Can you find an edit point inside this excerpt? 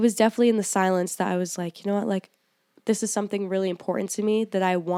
no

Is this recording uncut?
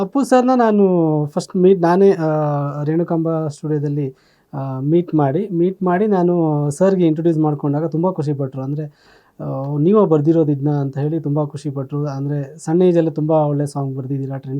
yes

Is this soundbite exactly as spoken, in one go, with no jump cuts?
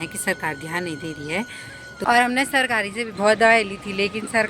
no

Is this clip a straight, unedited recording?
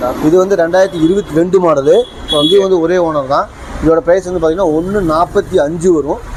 yes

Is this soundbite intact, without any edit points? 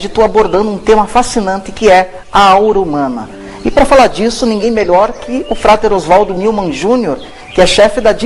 yes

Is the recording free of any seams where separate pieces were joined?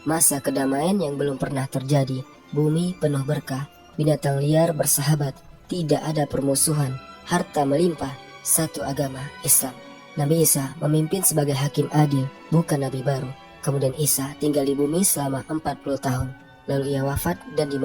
yes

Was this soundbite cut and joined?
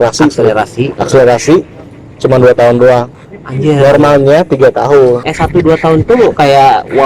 yes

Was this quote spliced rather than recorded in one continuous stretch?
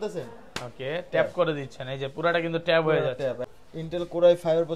yes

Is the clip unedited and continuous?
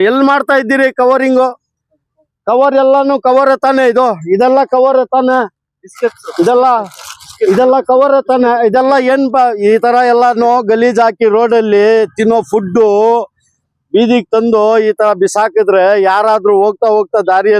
yes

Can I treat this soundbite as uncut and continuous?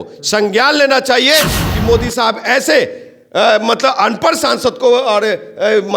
no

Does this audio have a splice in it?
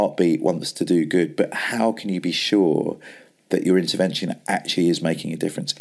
no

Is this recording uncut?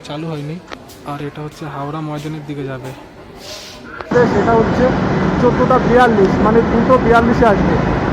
no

